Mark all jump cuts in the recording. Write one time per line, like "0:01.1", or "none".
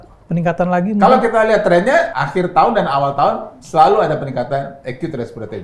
0:02.1

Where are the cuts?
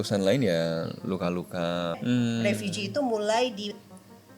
0:02.0

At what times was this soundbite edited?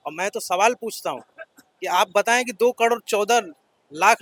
none

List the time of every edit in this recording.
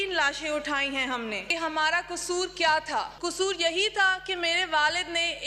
0:01.4
0:03.1

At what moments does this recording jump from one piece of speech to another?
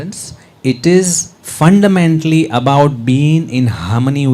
none

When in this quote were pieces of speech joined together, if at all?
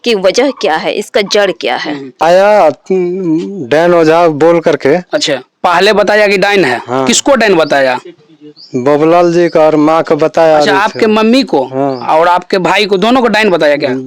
0:02.2

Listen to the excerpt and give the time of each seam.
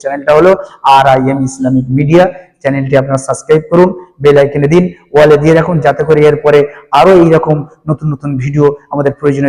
none

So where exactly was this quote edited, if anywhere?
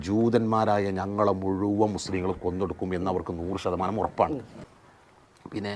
0:04.6

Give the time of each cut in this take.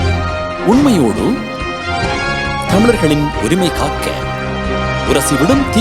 none

